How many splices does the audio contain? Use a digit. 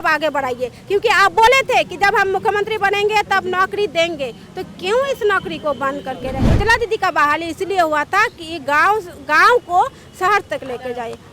1